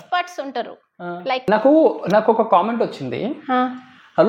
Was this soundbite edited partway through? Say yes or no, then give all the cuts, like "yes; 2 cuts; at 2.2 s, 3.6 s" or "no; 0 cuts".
yes; 1 cut; at 1.5 s